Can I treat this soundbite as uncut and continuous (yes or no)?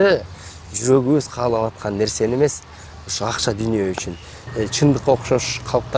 no